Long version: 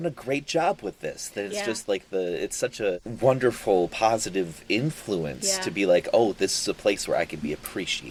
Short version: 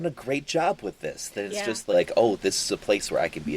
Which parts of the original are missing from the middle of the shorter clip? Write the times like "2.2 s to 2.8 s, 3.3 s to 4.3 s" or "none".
1.9 s to 5.9 s